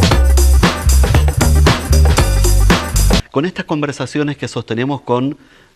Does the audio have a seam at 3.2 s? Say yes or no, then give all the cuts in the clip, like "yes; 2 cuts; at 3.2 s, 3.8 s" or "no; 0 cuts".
yes; 1 cut; at 3.2 s